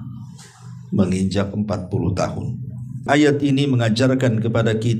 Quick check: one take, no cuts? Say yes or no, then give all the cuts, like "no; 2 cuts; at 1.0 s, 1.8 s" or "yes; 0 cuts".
no; 1 cut; at 3.0 s